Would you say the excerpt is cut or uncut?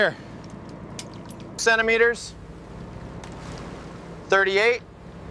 cut